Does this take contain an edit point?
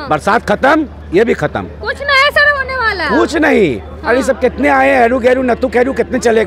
no; 0 cuts

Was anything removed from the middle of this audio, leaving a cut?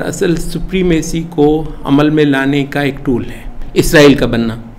yes; 1 cut; at 3.6 s

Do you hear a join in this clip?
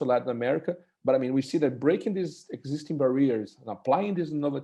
no; 0 cuts

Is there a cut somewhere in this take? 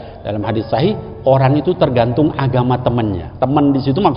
yes; 1 cut; at 3.2 s

